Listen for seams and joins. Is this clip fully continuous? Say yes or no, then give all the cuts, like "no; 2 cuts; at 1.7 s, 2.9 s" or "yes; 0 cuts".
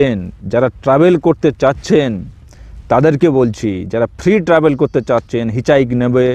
yes; 0 cuts